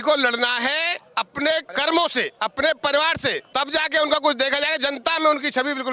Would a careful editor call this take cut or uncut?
cut